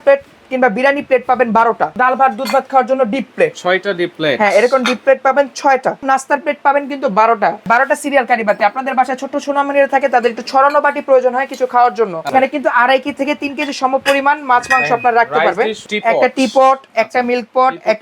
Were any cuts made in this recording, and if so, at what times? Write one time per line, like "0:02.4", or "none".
0:01.9
0:06.0
0:07.7
0:12.3
0:15.8